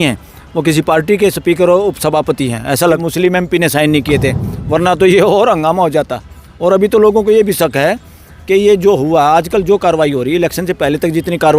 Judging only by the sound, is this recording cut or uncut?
cut